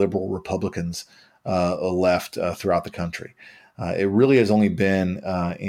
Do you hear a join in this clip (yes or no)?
no